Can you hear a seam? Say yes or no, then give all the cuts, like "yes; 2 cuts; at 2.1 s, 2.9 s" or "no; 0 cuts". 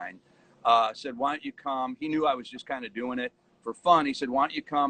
no; 0 cuts